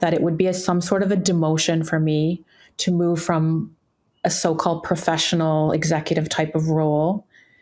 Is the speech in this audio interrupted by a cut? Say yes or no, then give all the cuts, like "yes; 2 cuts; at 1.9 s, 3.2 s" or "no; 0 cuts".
no; 0 cuts